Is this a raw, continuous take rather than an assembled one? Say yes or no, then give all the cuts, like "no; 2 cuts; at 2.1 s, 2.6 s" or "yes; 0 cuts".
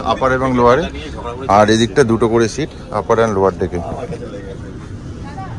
yes; 0 cuts